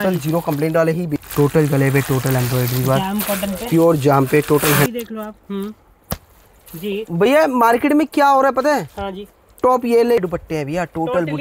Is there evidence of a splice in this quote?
yes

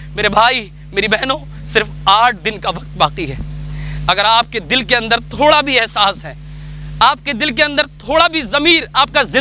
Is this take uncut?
yes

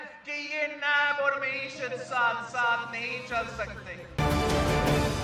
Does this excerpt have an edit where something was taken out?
yes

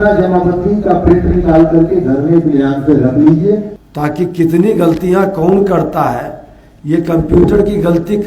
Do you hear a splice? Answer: yes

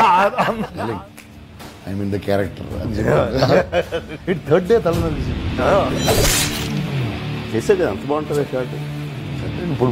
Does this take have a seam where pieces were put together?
no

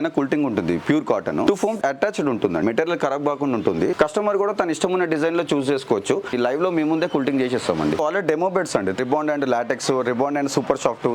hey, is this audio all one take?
no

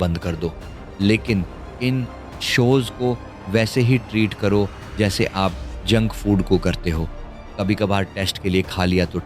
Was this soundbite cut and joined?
no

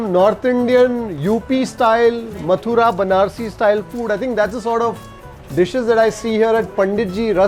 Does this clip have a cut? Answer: no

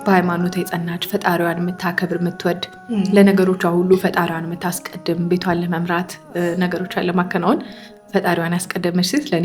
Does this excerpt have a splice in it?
no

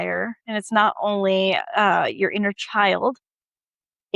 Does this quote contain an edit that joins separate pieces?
no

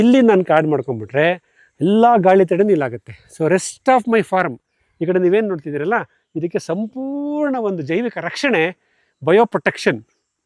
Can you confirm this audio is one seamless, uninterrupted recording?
yes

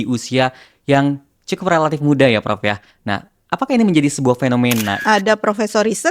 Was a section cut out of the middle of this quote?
yes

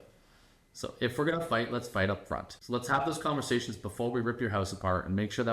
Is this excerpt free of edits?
no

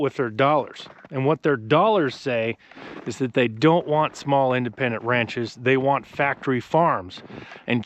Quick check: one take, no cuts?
yes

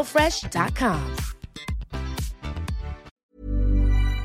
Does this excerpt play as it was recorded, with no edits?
no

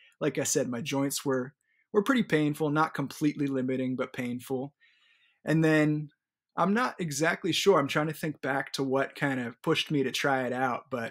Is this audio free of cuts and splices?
yes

